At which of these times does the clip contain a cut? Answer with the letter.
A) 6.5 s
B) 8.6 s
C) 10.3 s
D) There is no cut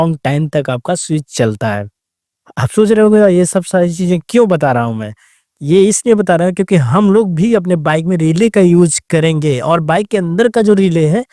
D